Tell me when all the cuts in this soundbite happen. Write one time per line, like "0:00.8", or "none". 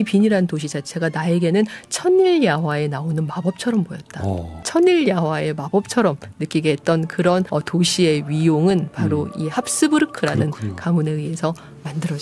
0:04.7
0:07.5